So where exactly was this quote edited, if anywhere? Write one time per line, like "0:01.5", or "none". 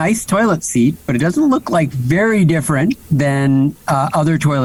none